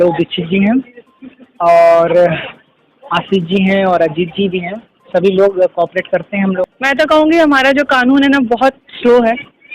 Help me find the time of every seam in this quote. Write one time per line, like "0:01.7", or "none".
0:06.6